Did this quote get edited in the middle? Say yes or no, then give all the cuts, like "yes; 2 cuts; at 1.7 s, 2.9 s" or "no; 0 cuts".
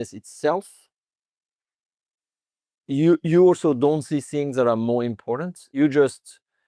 yes; 1 cut; at 5.8 s